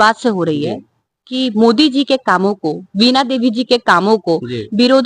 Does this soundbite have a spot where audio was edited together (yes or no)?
no